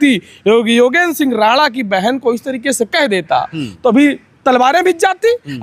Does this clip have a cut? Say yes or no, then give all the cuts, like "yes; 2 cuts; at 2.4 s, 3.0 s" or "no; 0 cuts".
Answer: no; 0 cuts